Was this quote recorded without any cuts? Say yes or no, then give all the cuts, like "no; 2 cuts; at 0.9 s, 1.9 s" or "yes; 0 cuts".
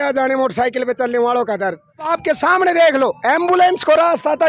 no; 1 cut; at 2.1 s